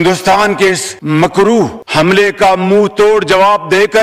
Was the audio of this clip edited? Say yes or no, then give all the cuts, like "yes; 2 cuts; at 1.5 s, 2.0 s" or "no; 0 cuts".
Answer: no; 0 cuts